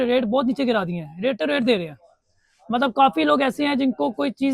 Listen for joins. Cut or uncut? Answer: uncut